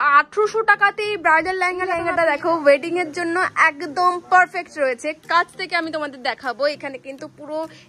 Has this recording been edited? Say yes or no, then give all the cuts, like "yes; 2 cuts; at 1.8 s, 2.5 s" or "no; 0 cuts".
yes; 1 cut; at 2.0 s